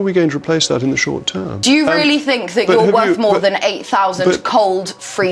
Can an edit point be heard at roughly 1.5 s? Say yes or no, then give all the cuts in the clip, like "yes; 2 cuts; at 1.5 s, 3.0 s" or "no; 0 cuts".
yes; 1 cut; at 1.5 s